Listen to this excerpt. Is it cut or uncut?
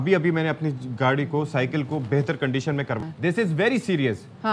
cut